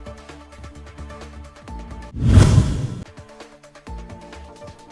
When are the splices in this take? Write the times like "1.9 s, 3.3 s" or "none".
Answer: 2.1 s